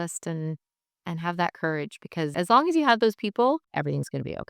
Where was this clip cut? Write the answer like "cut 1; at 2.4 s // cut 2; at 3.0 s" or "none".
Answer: cut 1; at 2.3 s // cut 2; at 3.7 s

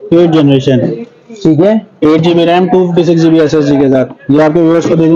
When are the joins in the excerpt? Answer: none

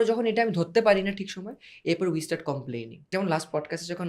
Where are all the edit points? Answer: cut 1; at 3.0 s

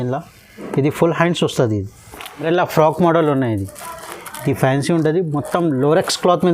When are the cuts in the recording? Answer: cut 1; at 2.4 s

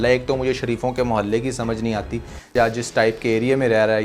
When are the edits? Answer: cut 1; at 2.4 s

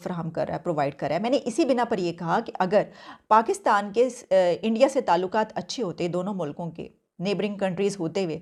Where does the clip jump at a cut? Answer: none

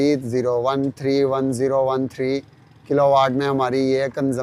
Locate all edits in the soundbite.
none

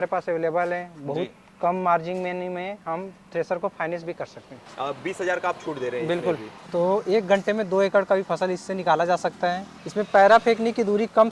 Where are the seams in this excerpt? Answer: cut 1; at 4.6 s // cut 2; at 6.5 s // cut 3; at 9.7 s

